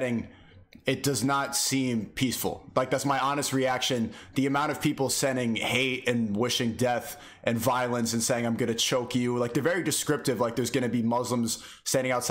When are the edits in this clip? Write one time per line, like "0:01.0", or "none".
none

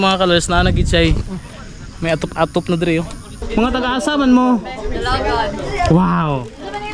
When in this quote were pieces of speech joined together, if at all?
0:03.3

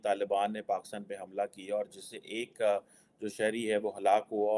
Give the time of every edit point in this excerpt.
none

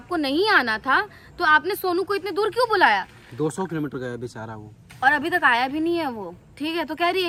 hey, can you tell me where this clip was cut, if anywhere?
none

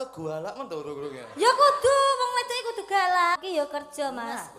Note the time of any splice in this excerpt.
0:03.4

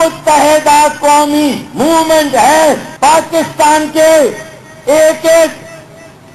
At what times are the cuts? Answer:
0:02.9
0:03.9

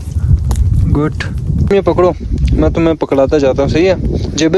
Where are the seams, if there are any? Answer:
0:01.6

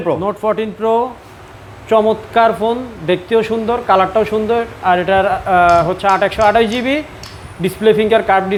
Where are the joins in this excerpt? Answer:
none

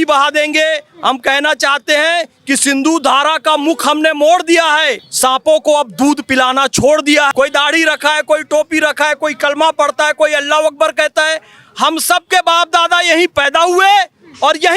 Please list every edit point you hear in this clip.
0:05.0
0:07.3

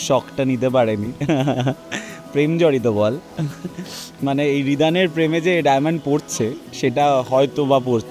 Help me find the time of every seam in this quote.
none

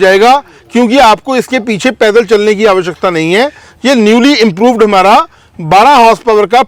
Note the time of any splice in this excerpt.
none

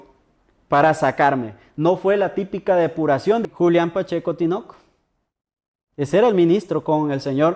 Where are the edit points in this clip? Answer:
0:03.4

